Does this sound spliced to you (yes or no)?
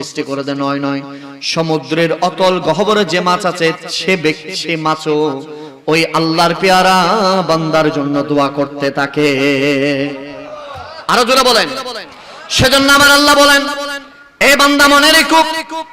no